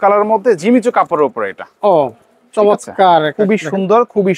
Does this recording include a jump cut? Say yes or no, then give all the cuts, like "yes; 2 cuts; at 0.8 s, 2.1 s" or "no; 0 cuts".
no; 0 cuts